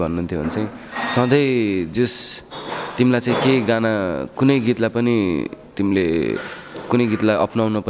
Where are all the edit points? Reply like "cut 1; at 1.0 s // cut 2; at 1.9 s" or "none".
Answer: none